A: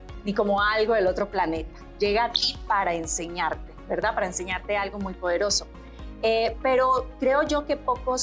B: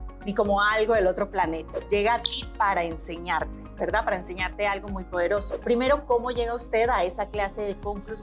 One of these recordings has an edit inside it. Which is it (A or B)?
B